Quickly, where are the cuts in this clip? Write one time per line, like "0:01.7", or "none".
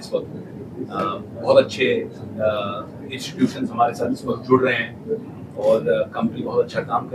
none